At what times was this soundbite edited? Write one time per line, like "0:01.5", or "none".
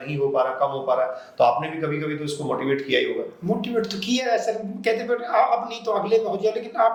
none